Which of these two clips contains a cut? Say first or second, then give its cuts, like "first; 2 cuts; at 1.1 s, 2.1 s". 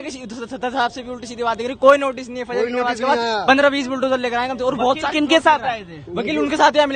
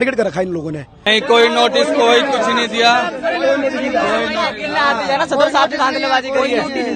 second; 1 cut; at 0.9 s